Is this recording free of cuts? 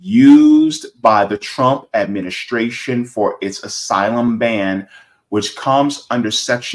yes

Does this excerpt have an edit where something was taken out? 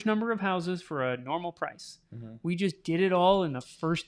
no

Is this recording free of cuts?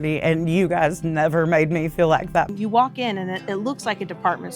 no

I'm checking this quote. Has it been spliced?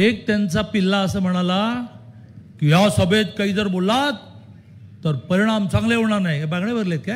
no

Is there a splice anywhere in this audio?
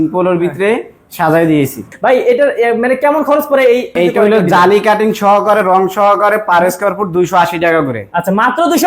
yes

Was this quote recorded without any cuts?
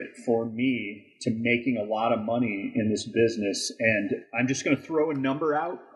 yes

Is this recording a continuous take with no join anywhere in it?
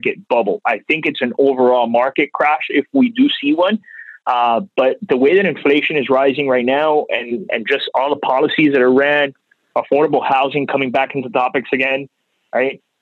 yes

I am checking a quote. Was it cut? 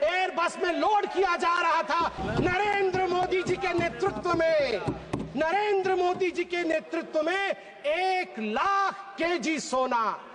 yes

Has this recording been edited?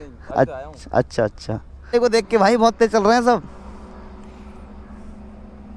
no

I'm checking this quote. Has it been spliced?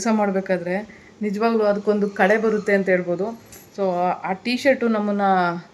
no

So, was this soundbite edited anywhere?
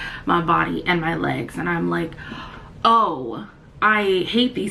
no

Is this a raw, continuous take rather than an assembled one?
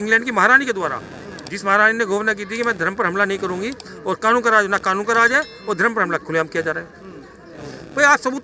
yes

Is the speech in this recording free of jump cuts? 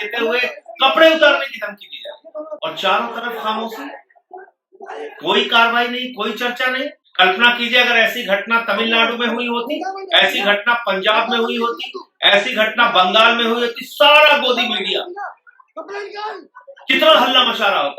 no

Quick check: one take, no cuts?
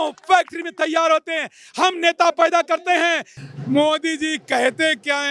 no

